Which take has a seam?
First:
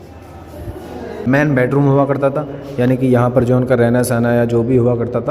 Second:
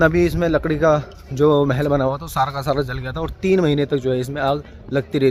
first; 1 cut; at 1.2 s

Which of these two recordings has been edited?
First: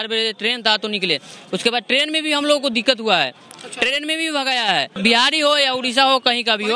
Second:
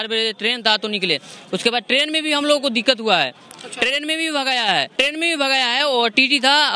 first; 1 cut; at 4.9 s

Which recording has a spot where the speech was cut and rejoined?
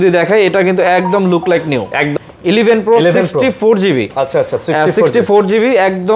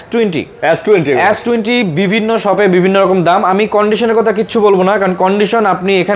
first; 1 cut; at 2.1 s

